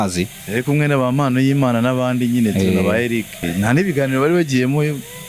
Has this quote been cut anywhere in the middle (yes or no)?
yes